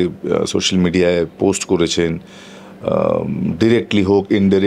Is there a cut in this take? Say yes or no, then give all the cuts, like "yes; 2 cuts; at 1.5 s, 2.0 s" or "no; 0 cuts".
no; 0 cuts